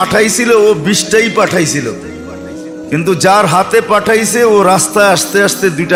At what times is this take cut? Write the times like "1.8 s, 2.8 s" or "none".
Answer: none